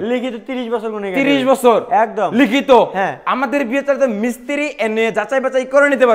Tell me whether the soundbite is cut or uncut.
uncut